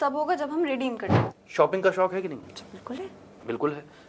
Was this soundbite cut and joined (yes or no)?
yes